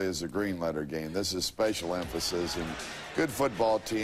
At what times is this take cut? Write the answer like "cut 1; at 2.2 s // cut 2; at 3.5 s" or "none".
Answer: cut 1; at 2.6 s

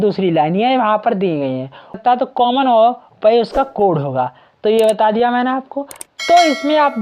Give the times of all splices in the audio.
cut 1; at 2.0 s

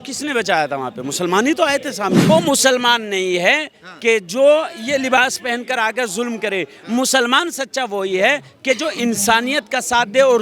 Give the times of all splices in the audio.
cut 1; at 2.3 s

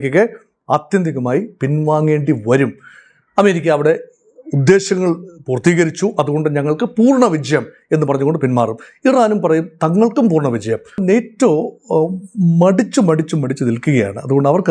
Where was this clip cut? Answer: cut 1; at 11.0 s

